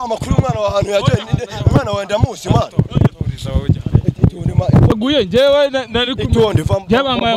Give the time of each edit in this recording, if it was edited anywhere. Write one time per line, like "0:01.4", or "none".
0:04.9

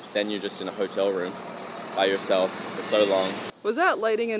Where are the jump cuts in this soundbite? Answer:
0:03.5

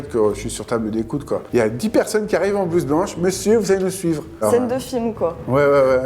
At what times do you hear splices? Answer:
0:01.4
0:04.4

